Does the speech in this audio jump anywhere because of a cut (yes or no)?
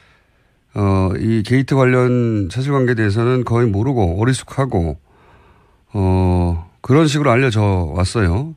yes